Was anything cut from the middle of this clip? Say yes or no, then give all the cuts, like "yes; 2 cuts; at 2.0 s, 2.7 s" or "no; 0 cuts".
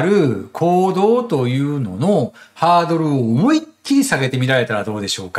no; 0 cuts